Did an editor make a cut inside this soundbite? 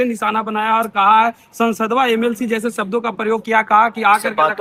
no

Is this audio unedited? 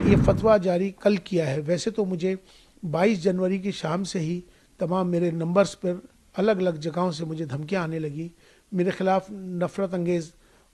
yes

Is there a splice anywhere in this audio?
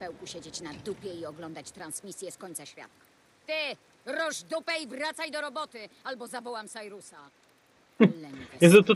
no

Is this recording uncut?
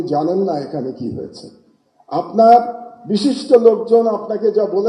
yes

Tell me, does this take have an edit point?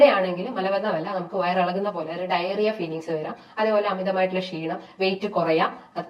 no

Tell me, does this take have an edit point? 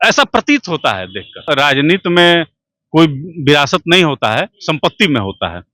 yes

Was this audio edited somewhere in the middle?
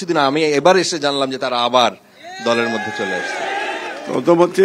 no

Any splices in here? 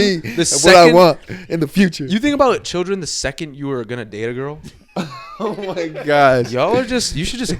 no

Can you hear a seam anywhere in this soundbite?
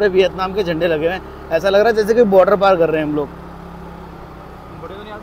no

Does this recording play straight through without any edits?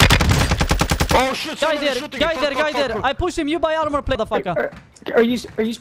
no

